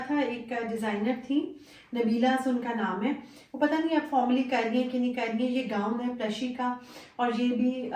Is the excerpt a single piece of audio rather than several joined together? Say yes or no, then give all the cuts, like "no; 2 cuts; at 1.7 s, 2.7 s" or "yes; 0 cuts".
yes; 0 cuts